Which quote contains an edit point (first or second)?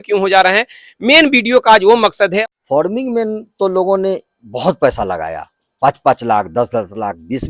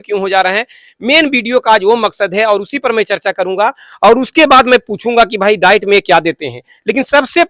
first